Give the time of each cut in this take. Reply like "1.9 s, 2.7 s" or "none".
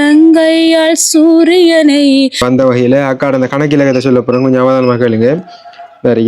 2.4 s